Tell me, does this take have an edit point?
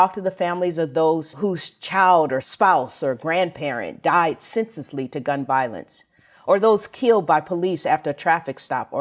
yes; 1 cut; at 1.3 s

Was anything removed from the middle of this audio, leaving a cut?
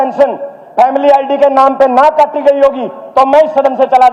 no; 0 cuts

